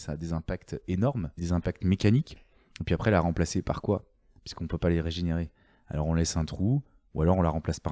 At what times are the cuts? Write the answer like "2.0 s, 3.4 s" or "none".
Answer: 1.4 s